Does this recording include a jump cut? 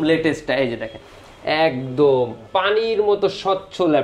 no; 0 cuts

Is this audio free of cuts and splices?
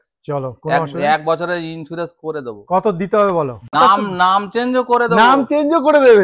no; 1 cut; at 3.8 s

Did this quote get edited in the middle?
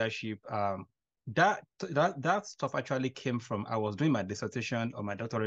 yes; 1 cut; at 1.2 s

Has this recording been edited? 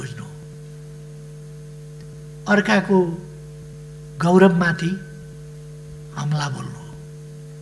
no; 0 cuts

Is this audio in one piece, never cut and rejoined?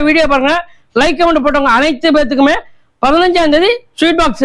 yes; 0 cuts

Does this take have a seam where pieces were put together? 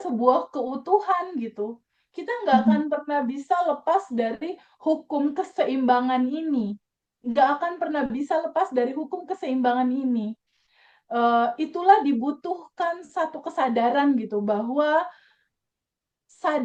no; 0 cuts

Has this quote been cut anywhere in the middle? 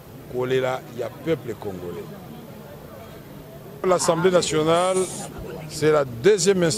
yes; 1 cut; at 3.8 s

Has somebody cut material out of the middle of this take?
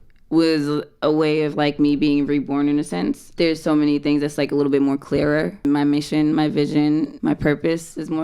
yes; 3 cuts; at 3.3 s, 5.7 s, 7.1 s

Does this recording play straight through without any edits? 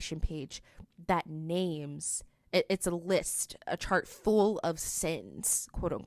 yes; 0 cuts

